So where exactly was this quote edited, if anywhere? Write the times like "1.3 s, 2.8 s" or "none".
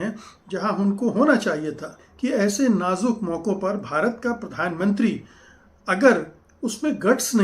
2.0 s